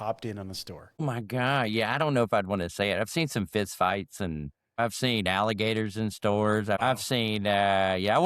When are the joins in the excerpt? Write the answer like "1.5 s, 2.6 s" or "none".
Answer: 1.0 s, 4.8 s, 6.8 s